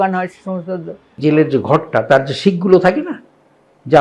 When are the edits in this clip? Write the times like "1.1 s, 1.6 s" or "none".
1.1 s